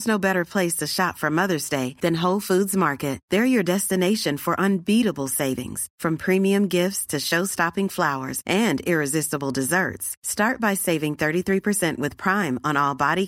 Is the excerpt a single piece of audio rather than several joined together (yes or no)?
yes